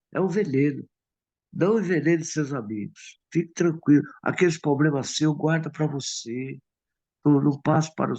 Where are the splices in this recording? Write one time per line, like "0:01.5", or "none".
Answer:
none

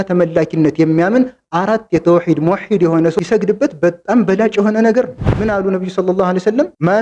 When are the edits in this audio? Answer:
0:05.2

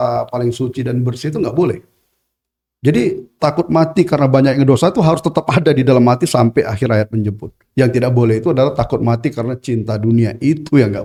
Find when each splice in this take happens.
none

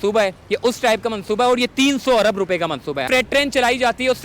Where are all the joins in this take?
0:03.1

